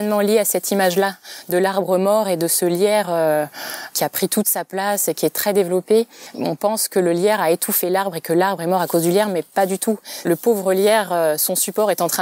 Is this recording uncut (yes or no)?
yes